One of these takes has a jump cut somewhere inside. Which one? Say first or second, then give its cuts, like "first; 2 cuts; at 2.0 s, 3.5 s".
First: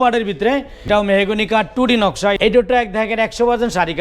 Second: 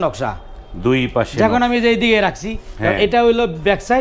first; 2 cuts; at 0.9 s, 2.4 s